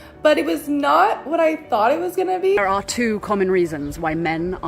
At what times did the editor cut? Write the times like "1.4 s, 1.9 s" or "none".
2.6 s